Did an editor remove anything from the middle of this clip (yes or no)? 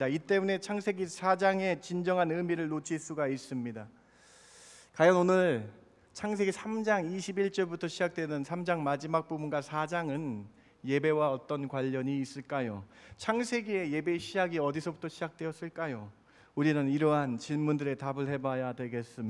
no